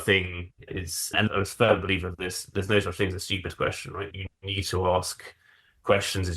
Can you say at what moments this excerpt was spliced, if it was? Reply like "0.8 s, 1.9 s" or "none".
1.3 s